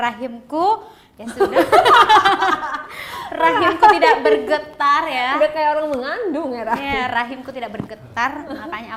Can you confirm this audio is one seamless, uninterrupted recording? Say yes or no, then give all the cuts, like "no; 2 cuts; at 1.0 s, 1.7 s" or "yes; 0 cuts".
yes; 0 cuts